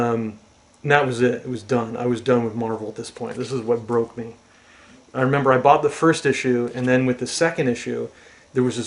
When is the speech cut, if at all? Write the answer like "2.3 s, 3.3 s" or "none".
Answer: none